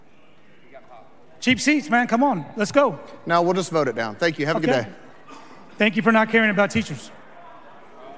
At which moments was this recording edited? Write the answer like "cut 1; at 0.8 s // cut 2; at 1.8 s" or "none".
none